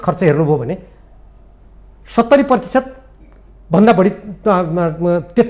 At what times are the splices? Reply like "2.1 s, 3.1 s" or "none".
none